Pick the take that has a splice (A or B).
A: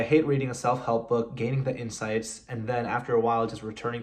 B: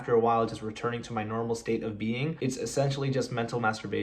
B